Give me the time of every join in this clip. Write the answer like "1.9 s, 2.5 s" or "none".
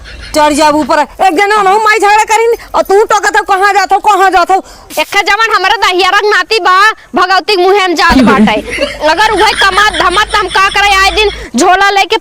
4.8 s